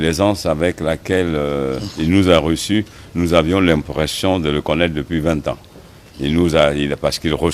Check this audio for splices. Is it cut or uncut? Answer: uncut